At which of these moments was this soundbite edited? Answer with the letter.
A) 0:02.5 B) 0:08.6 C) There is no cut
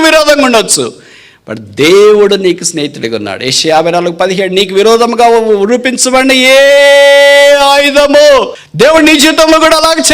B